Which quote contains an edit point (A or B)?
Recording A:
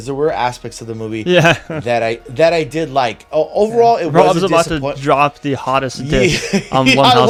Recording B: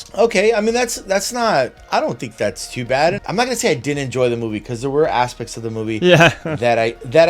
B